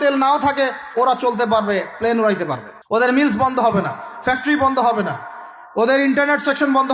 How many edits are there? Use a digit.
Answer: 1